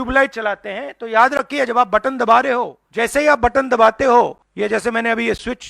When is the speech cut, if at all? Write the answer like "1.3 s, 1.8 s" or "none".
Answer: 2.8 s, 4.4 s